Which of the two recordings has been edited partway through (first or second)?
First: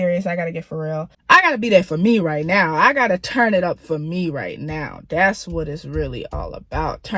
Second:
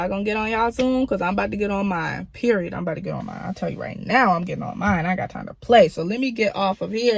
first